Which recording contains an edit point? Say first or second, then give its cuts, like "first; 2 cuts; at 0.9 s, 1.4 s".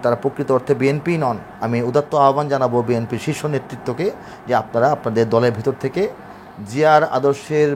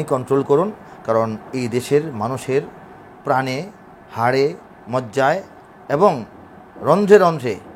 first; 1 cut; at 1.5 s